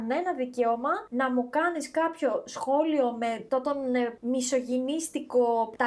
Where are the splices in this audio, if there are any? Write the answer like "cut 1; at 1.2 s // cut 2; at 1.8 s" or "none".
none